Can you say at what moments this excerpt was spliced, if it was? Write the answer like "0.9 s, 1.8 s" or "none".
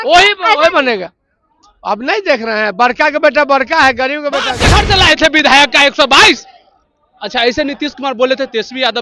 4.5 s